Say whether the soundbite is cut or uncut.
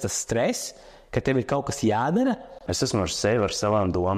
cut